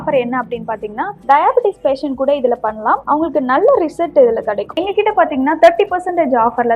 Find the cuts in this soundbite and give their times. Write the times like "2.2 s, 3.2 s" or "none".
1.2 s, 4.8 s